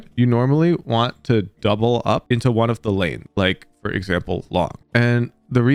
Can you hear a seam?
no; 0 cuts

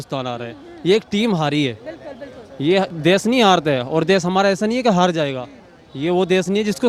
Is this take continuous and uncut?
yes; 0 cuts

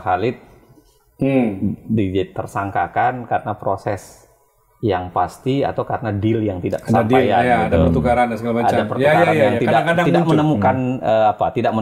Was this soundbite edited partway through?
no; 0 cuts

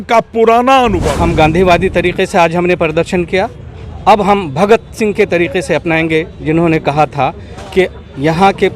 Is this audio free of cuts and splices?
no; 1 cut; at 1.1 s

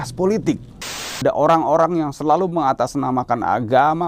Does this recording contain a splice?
yes; 1 cut; at 1.2 s

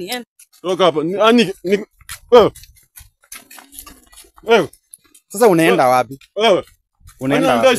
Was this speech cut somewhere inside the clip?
no; 0 cuts

